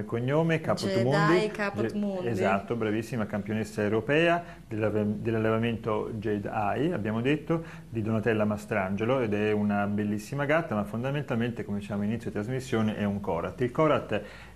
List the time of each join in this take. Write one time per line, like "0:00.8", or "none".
0:03.1

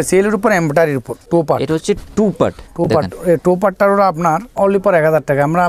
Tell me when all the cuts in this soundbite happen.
0:01.3
0:04.5

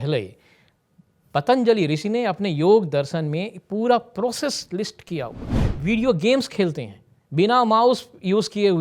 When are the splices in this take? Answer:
0:05.7

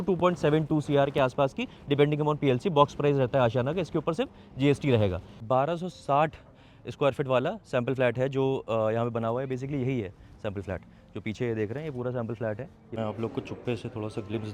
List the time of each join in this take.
0:05.3
0:12.9

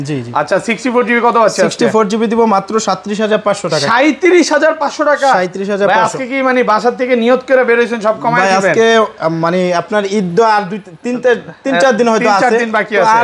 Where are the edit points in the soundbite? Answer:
none

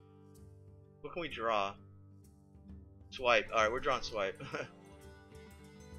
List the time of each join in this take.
0:01.0

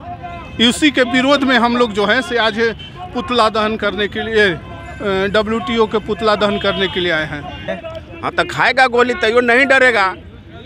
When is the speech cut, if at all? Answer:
0:07.7

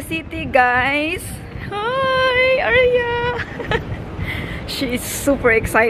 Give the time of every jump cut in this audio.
none

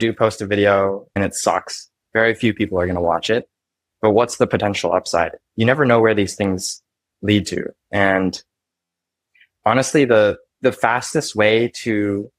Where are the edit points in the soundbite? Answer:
0:01.1

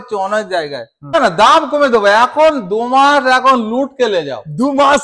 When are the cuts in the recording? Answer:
0:01.1

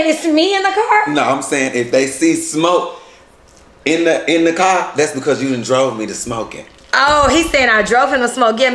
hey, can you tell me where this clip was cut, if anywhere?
none

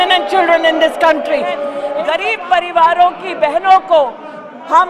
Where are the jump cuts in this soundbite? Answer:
0:01.9

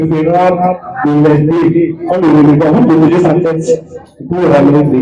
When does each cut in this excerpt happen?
none

